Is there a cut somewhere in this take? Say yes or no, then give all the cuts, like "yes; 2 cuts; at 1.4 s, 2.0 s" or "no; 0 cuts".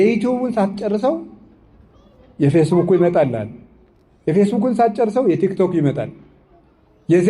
no; 0 cuts